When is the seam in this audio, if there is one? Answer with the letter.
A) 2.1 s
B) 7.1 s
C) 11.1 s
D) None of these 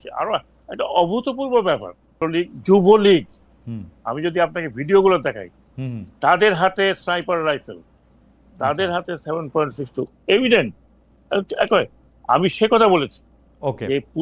A